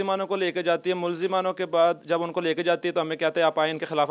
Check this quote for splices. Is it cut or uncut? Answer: uncut